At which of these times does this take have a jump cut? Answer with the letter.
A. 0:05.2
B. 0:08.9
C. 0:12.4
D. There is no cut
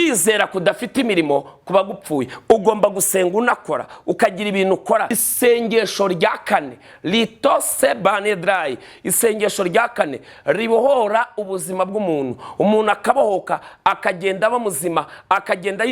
A